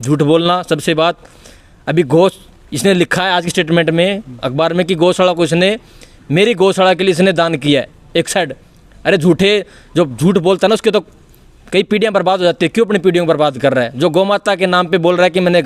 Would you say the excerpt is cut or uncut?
uncut